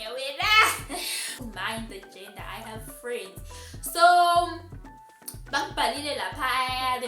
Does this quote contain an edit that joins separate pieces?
yes; 1 cut; at 1.4 s

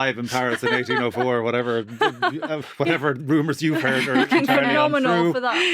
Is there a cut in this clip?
no; 0 cuts

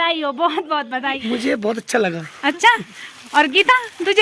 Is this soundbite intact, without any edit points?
no; 1 cut; at 1.2 s

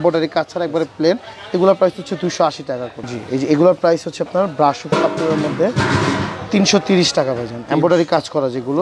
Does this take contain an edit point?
no; 0 cuts

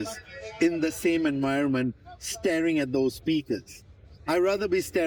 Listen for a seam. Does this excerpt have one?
no; 0 cuts

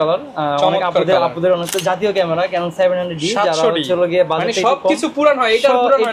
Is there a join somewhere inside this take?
yes; 1 cut; at 1.7 s

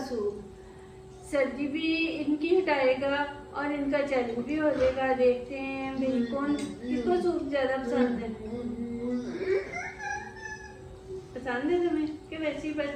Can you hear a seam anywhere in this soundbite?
no; 0 cuts

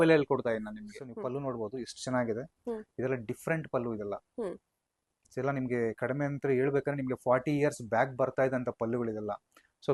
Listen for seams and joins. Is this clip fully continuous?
no; 1 cut; at 1.0 s

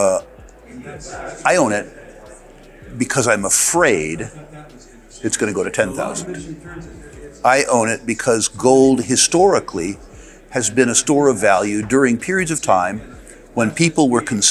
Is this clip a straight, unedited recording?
yes; 0 cuts

